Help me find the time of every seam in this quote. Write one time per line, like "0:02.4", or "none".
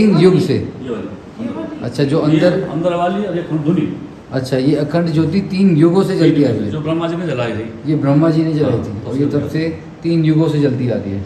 none